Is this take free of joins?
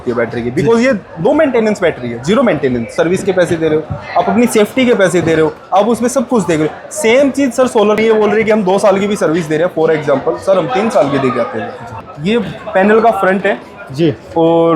no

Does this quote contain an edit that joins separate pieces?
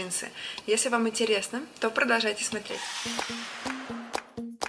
no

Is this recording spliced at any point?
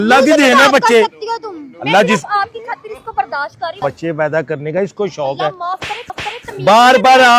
yes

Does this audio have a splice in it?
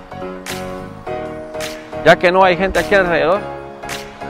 no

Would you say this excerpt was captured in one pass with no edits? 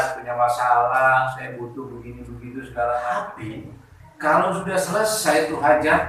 no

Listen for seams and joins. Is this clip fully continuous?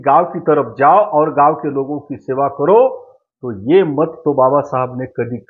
yes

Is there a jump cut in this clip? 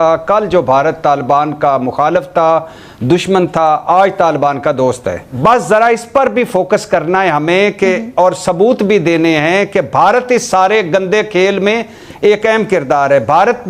yes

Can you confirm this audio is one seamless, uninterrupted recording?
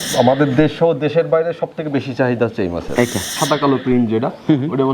no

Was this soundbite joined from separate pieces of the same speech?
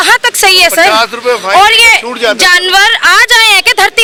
no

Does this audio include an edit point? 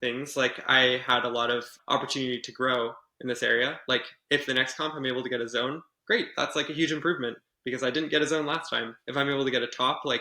yes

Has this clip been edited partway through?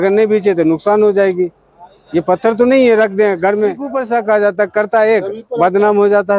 yes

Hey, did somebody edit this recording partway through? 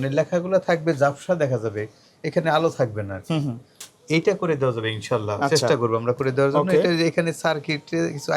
no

